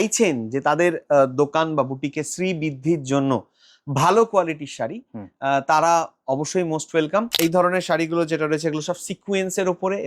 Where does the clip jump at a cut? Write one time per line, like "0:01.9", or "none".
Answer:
0:07.3